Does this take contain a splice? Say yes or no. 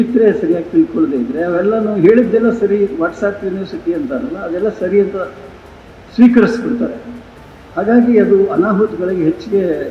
no